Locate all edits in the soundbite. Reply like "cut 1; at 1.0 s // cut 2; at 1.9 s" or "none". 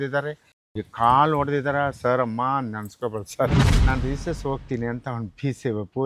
cut 1; at 3.7 s